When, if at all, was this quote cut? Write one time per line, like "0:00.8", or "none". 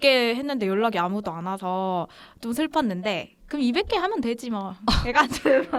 none